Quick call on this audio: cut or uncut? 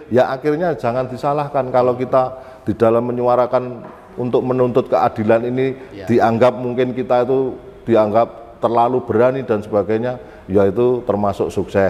uncut